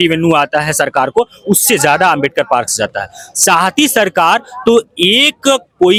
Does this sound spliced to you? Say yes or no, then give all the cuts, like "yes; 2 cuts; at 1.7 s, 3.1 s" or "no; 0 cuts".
no; 0 cuts